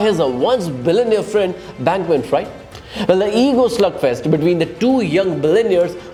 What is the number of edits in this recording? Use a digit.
0